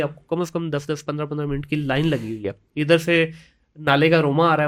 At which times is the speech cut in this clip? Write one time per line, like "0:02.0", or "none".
none